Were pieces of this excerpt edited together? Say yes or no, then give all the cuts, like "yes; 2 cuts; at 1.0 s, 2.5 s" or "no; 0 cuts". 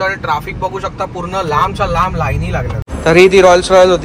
yes; 1 cut; at 2.9 s